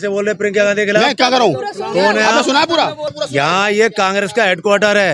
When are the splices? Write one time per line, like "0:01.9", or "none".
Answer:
0:03.0